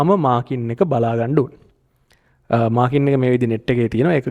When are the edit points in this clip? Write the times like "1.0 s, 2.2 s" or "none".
none

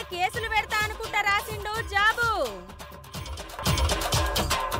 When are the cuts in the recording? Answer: 3.6 s

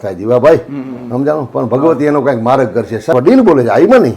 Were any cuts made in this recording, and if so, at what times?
3.1 s

